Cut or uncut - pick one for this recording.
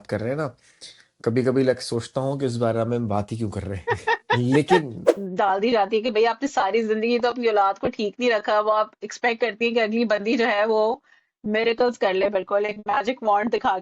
cut